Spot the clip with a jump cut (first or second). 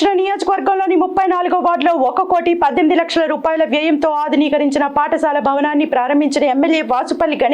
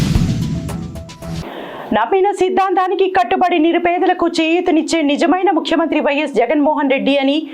second